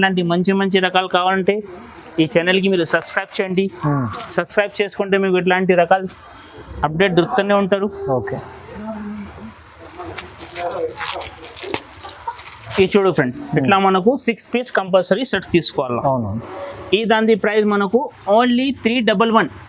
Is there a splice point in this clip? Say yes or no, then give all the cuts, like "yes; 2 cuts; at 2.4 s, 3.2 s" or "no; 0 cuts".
no; 0 cuts